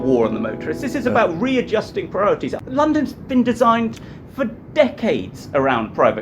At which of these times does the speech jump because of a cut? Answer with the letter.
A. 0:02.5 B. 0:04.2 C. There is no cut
A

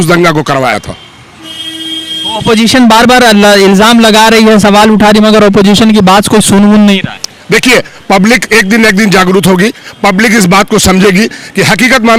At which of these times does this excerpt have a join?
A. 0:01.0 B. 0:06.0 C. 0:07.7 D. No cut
D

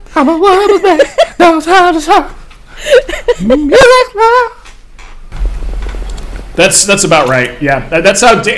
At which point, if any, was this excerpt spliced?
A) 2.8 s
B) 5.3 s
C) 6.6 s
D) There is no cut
B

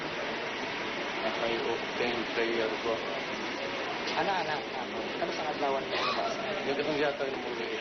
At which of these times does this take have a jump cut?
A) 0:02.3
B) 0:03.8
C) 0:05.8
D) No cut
C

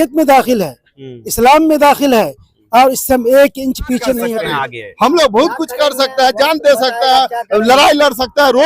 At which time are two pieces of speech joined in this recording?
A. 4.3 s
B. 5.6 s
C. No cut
A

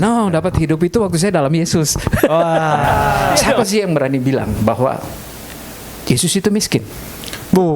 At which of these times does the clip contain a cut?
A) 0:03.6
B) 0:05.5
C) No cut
A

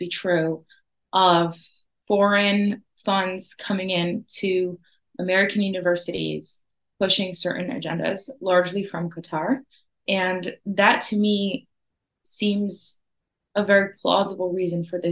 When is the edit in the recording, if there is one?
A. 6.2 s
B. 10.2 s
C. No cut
C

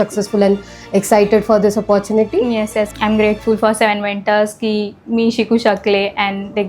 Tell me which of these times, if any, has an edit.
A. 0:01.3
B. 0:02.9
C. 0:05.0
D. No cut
B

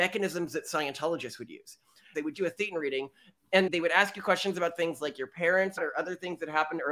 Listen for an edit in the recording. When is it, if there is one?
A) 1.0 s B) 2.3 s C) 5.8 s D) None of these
C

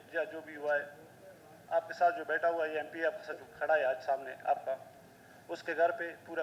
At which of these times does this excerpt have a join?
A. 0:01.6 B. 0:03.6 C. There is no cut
A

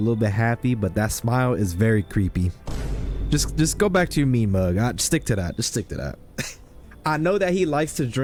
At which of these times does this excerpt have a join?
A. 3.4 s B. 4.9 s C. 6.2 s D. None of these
D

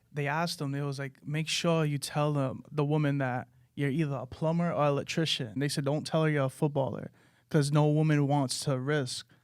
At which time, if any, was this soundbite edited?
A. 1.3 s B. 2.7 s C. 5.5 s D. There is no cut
C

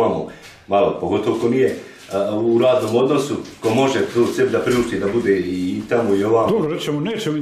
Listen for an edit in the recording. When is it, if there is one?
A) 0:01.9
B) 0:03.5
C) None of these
C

